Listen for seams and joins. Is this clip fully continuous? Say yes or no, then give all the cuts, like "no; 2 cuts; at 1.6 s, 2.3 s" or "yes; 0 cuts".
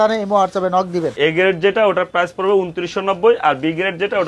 no; 1 cut; at 1.1 s